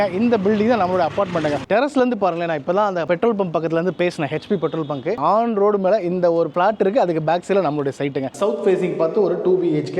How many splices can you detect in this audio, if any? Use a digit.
3